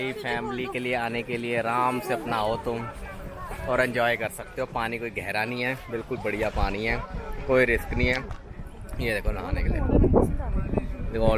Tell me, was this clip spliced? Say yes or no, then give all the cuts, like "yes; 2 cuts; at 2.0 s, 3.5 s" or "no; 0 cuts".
no; 0 cuts